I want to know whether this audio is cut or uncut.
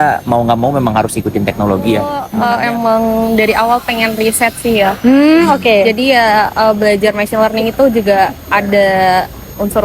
cut